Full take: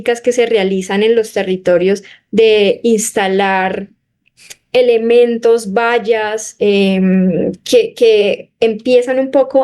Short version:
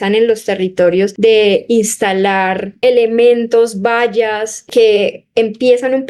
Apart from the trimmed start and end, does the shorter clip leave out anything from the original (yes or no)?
yes